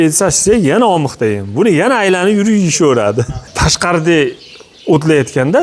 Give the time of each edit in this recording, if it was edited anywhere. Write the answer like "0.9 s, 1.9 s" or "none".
3.4 s